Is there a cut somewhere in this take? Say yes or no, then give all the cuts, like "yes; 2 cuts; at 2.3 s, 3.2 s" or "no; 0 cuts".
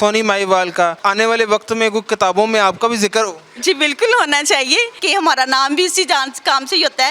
yes; 2 cuts; at 1.0 s, 5.0 s